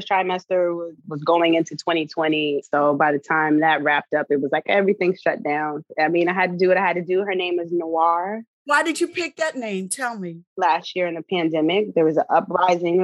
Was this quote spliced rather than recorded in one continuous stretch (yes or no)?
yes